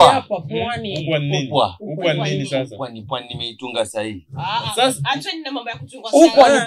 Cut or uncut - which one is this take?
uncut